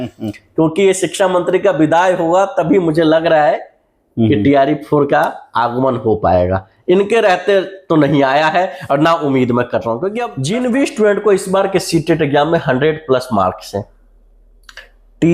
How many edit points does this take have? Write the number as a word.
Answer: one